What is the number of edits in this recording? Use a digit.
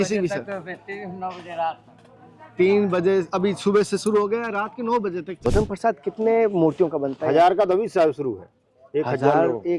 1